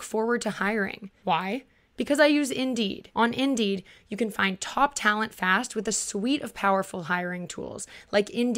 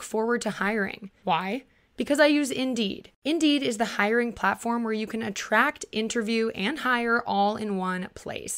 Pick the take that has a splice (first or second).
first